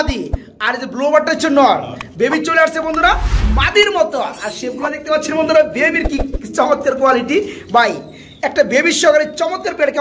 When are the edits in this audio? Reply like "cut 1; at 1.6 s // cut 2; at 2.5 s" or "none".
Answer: none